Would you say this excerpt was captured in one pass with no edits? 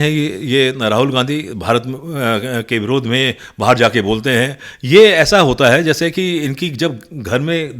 yes; 0 cuts

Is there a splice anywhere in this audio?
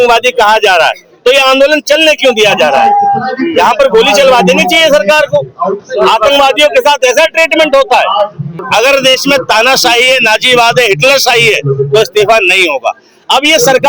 yes; 1 cut; at 8.6 s

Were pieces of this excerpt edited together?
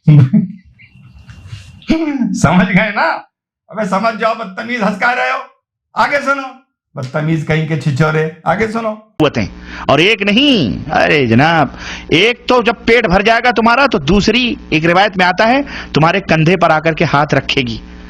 yes; 1 cut; at 9.1 s

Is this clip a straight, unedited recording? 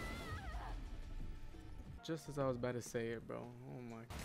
no; 1 cut; at 2.0 s

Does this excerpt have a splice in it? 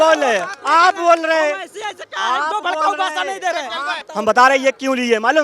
yes; 1 cut; at 3.8 s

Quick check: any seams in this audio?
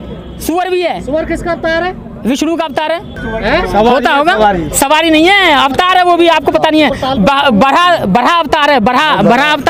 no; 0 cuts

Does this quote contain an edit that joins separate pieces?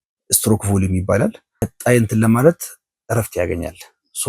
yes; 1 cut; at 1.7 s

